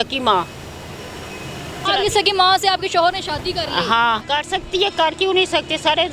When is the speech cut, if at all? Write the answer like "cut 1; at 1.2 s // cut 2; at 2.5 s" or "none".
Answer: cut 1; at 1.8 s // cut 2; at 4.2 s

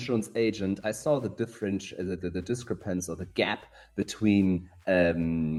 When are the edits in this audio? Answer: none

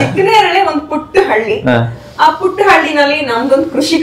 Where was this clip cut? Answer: none

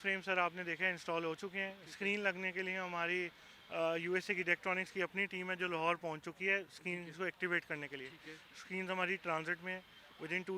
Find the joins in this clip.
none

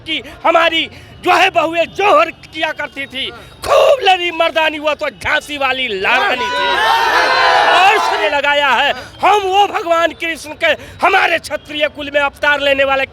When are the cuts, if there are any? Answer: cut 1; at 8.2 s

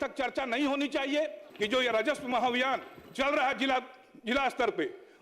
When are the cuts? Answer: cut 1; at 1.4 s

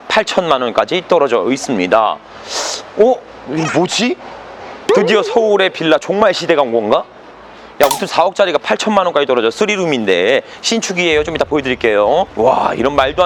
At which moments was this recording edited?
none

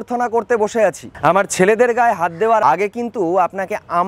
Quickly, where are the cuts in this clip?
cut 1; at 1.1 s

